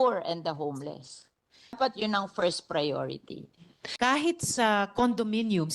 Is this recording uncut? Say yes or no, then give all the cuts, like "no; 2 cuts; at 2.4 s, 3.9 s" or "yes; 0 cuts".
no; 2 cuts; at 1.8 s, 3.8 s